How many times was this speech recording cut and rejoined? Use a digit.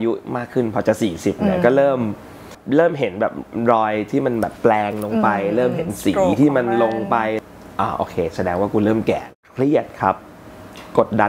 3